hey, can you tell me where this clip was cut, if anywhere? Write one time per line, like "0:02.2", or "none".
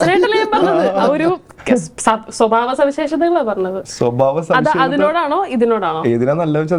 none